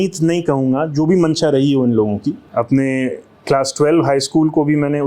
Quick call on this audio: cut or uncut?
cut